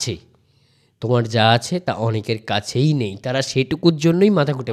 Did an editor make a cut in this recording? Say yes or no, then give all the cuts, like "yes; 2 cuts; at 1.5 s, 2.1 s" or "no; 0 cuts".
no; 0 cuts